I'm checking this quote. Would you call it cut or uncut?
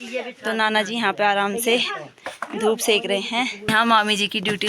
cut